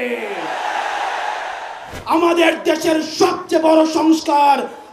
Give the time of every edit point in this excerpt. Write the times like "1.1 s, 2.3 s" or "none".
1.9 s